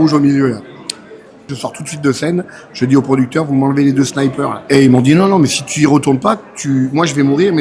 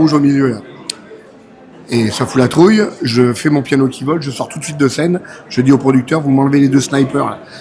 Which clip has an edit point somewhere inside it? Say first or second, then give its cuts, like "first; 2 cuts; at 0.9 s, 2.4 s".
first; 2 cuts; at 1.5 s, 4.6 s